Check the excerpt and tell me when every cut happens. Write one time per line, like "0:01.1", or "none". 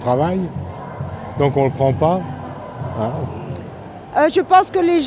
0:03.7